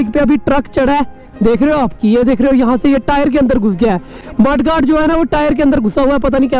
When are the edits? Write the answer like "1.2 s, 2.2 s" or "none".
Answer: 2.0 s